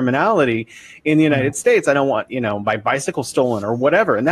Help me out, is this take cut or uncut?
uncut